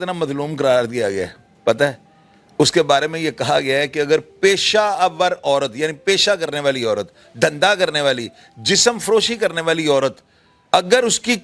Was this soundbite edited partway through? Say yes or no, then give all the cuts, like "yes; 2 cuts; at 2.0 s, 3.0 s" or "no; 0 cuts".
no; 0 cuts